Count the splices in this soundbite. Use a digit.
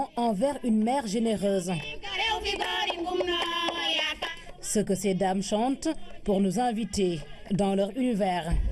1